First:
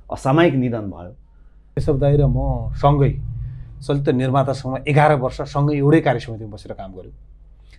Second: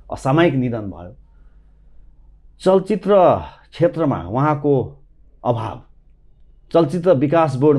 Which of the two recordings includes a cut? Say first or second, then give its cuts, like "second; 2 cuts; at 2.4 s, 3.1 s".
first; 1 cut; at 1.8 s